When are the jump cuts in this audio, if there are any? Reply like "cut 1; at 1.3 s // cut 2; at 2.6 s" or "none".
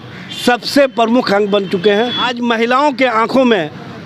cut 1; at 2.3 s